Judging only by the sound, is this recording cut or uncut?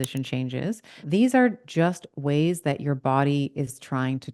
cut